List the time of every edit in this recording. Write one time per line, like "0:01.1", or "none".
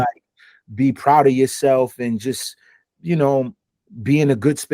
0:03.6